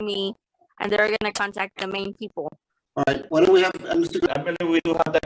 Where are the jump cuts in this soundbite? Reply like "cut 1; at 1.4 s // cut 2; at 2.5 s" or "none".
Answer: cut 1; at 4.3 s